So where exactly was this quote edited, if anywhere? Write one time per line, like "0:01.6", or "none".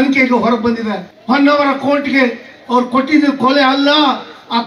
0:01.1